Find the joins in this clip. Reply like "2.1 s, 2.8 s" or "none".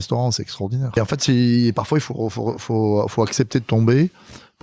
1.0 s